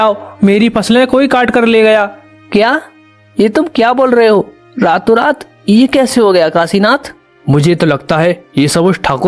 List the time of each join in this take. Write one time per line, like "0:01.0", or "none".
none